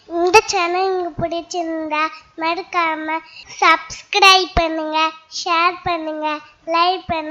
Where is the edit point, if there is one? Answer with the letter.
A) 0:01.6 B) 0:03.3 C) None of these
C